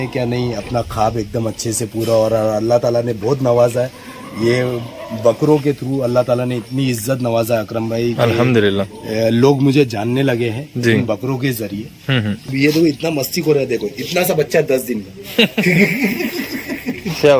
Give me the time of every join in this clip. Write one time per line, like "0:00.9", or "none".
0:12.5

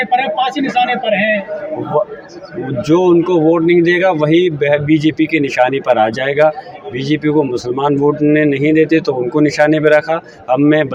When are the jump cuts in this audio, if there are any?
none

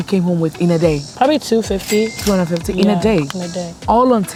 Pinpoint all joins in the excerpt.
none

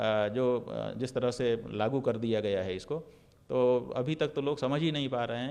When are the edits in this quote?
none

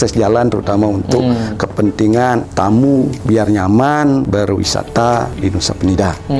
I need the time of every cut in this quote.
0:02.5
0:03.2
0:04.3
0:05.3

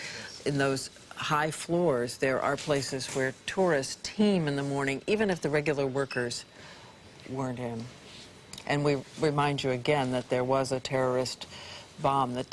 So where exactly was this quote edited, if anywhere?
0:04.2

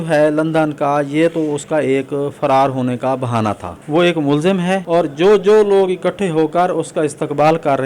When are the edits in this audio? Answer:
0:03.7
0:04.8

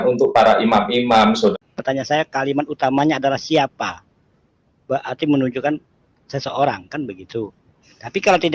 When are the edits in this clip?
0:01.5

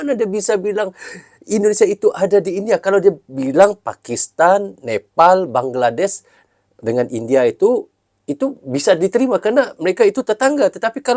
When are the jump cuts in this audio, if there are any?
none

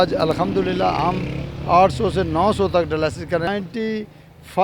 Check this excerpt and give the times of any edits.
0:03.5

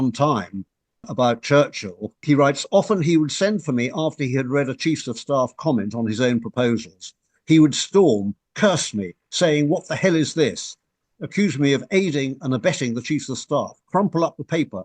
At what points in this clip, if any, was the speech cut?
0:01.1
0:02.2

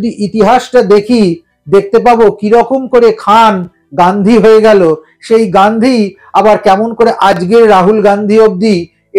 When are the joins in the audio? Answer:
none

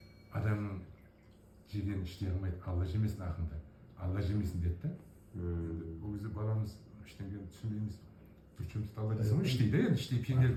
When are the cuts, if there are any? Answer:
none

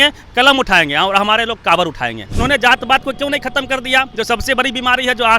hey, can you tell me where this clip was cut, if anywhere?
0:02.3

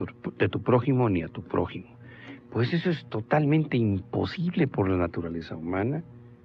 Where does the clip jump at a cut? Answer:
0:05.4

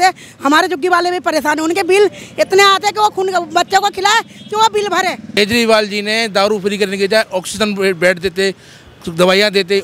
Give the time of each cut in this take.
0:05.4

